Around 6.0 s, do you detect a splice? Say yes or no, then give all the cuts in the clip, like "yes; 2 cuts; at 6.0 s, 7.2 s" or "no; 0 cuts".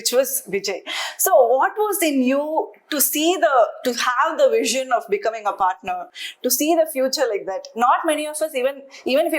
no; 0 cuts